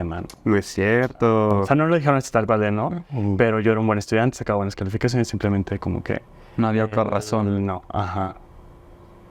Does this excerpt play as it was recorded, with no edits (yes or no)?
yes